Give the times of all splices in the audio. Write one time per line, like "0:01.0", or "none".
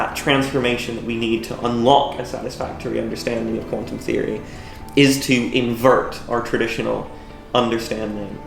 none